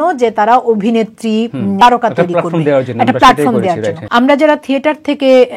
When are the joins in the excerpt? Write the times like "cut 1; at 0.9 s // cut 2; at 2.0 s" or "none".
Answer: cut 1; at 1.8 s // cut 2; at 4.0 s